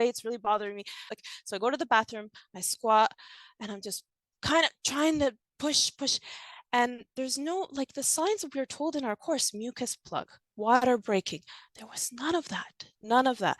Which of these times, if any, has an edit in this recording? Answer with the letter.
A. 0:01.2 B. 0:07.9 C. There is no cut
A